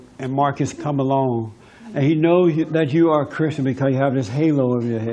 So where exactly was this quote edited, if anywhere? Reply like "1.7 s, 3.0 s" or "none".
1.2 s